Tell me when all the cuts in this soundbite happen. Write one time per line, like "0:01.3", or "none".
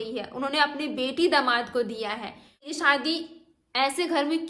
0:02.7